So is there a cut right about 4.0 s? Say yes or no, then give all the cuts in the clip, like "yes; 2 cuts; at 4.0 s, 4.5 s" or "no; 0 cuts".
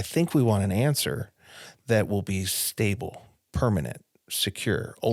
no; 0 cuts